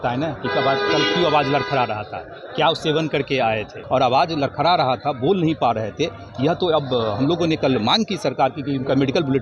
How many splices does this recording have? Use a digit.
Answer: 1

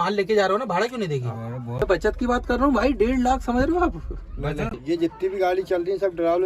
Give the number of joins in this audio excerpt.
2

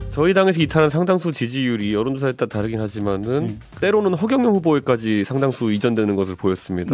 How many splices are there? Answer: 1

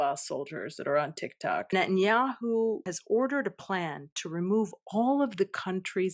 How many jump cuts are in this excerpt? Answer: 1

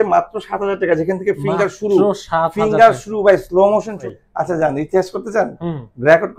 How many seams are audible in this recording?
1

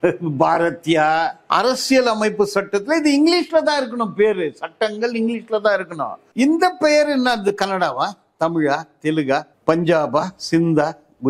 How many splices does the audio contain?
2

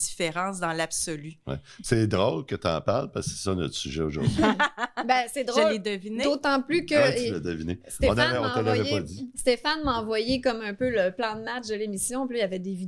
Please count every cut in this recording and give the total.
0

